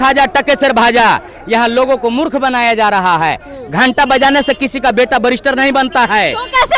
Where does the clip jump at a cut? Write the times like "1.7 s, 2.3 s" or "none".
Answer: none